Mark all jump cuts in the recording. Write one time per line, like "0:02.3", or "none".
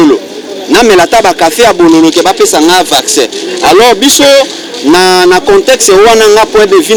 none

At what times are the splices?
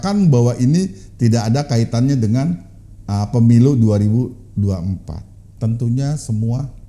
0:05.5

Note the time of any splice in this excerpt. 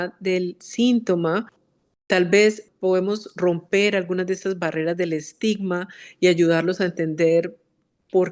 0:01.6
0:02.6

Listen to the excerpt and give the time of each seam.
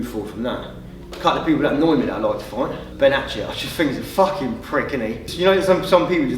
0:01.1
0:02.9
0:05.2

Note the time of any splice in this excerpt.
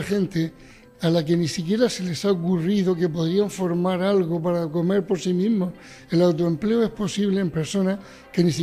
none

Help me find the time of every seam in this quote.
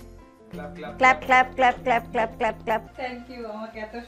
0:02.9

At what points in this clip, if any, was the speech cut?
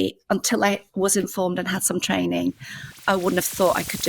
0:03.0

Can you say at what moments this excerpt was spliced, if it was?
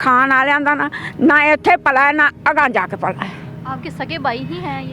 none

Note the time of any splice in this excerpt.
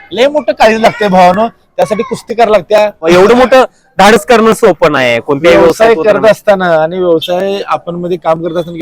0:03.0

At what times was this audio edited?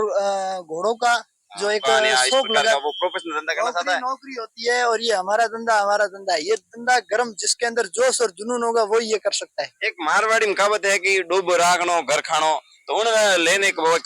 0:02.7

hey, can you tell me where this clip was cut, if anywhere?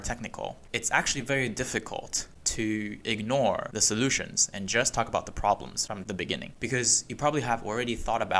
0:03.7
0:06.5

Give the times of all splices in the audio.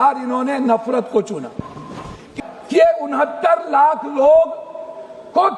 0:02.2

